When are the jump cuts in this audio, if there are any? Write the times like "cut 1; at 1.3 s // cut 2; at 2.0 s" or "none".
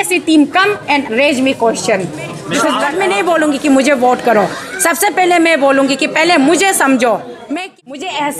cut 1; at 2.9 s // cut 2; at 7.5 s

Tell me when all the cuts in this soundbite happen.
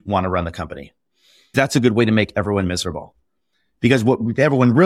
cut 1; at 1.5 s

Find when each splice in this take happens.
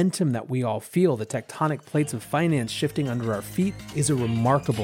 cut 1; at 3.9 s

